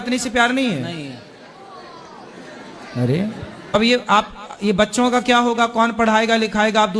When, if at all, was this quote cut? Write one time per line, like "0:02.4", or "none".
0:03.7